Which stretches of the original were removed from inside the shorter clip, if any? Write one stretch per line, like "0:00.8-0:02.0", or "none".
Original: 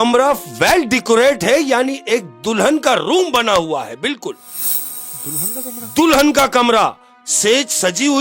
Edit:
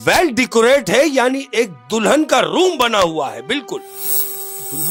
none

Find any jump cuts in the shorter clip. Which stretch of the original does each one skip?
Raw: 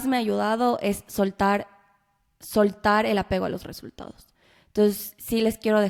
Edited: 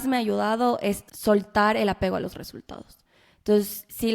0:01.0-0:02.3

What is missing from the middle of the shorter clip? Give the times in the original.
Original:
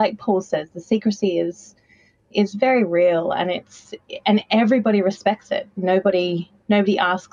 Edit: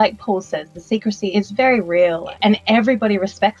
0:01.3-0:02.3
0:03.3-0:04.1

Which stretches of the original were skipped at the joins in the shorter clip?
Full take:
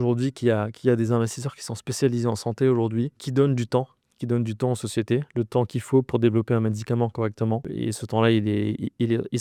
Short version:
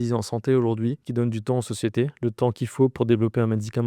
0:03.2-0:04.2

